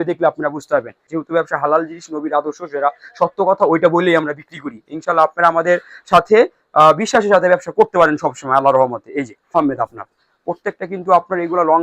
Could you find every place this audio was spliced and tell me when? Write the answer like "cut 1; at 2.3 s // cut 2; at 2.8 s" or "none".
cut 1; at 1.0 s // cut 2; at 9.6 s

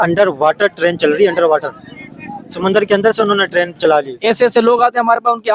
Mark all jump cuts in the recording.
cut 1; at 4.1 s

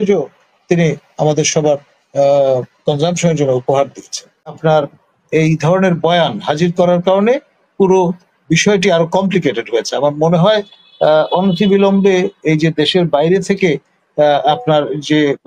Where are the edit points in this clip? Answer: cut 1; at 4.6 s

